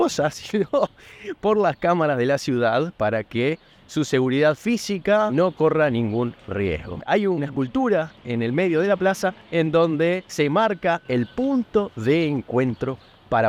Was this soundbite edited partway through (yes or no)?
no